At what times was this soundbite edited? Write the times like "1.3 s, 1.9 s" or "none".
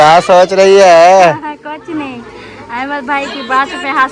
none